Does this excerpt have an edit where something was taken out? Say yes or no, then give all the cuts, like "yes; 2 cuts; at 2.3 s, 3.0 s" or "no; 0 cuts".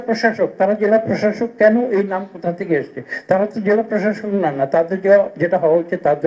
no; 0 cuts